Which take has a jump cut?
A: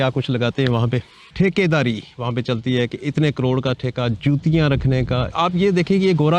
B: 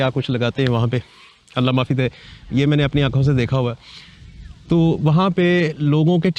A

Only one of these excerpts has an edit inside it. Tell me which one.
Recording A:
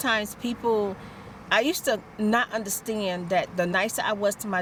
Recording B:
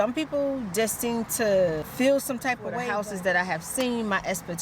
B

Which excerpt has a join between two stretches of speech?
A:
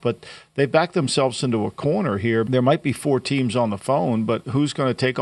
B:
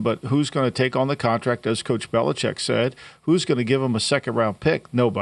A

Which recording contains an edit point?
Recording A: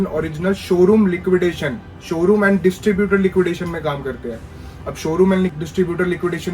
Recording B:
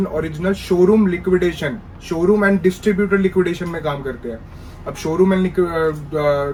A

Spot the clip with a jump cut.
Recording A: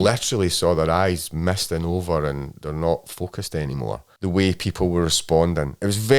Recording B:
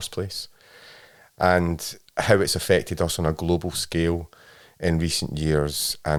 A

